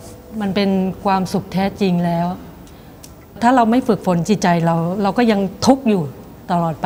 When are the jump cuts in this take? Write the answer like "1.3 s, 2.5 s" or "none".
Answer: 3.4 s